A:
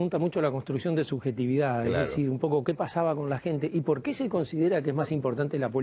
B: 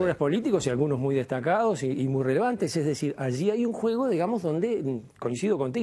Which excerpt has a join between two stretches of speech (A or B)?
B